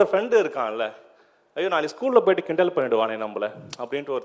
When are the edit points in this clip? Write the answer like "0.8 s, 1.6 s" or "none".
none